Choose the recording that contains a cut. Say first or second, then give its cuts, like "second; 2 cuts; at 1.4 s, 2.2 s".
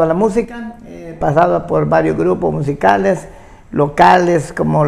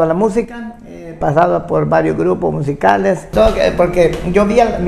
second; 1 cut; at 3.3 s